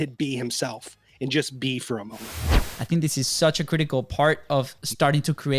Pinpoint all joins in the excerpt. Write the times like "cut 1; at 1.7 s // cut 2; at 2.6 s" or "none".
cut 1; at 2.7 s